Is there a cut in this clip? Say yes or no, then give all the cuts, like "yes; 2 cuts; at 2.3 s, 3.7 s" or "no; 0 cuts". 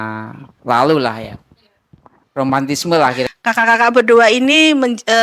yes; 1 cut; at 3.3 s